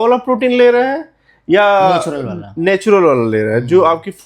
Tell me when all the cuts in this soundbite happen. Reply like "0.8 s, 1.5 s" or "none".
none